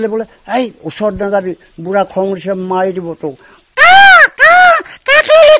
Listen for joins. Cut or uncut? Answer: uncut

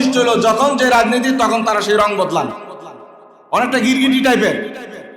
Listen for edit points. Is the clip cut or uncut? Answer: uncut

